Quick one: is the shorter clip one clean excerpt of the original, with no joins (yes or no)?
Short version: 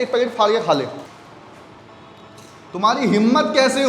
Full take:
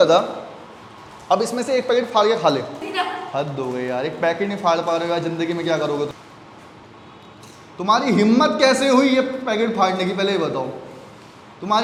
no